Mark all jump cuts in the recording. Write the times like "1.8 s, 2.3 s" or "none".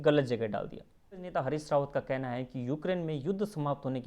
1.3 s